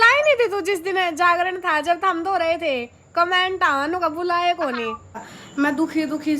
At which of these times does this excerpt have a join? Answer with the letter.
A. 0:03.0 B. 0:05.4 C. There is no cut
B